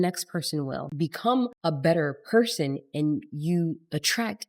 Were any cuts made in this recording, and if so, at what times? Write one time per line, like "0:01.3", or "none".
0:01.2